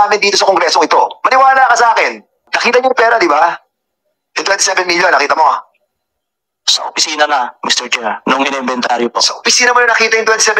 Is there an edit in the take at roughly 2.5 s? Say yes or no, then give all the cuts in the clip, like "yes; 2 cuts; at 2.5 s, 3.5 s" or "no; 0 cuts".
yes; 1 cut; at 2.5 s